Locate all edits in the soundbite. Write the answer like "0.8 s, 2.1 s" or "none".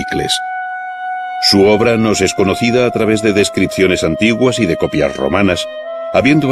1.6 s